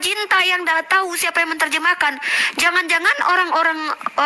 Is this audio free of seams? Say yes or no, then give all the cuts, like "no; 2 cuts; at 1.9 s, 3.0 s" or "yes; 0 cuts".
yes; 0 cuts